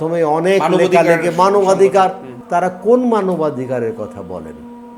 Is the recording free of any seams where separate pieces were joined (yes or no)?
no